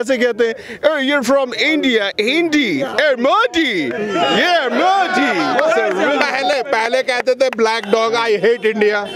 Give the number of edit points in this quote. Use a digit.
0